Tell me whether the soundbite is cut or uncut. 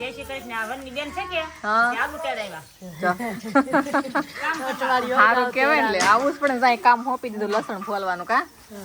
uncut